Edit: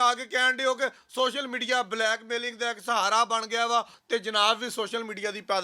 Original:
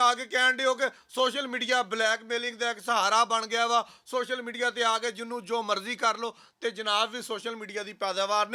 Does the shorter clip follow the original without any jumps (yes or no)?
no